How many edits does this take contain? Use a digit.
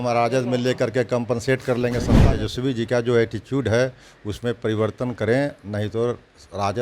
1